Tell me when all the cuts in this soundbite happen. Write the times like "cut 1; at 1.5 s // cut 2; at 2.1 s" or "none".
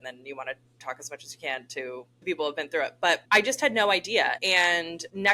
cut 1; at 0.8 s // cut 2; at 2.2 s // cut 3; at 3.2 s // cut 4; at 4.5 s